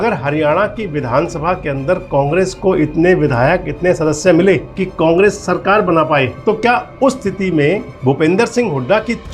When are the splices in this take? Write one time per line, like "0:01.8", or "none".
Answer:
0:04.8
0:06.3
0:07.9